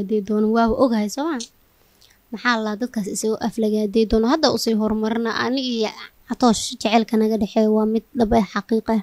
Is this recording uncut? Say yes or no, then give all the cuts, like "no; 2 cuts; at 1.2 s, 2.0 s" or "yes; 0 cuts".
yes; 0 cuts